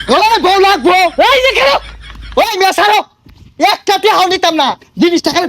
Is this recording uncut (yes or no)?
no